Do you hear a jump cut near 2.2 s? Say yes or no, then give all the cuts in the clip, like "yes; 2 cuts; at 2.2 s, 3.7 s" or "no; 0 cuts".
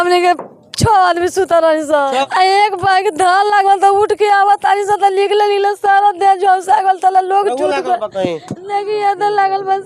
yes; 1 cut; at 2.2 s